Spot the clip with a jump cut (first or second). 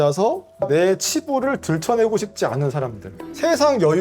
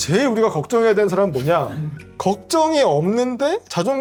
first